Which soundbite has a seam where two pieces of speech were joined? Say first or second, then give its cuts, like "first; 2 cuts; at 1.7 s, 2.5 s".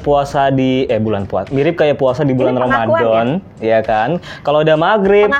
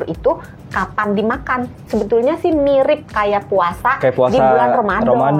second; 1 cut; at 1.8 s